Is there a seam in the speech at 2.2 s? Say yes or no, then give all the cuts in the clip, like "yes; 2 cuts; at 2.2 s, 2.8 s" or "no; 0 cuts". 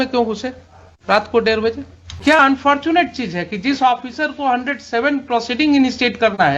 yes; 1 cut; at 2.2 s